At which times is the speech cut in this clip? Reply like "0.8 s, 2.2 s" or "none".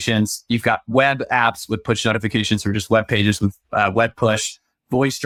none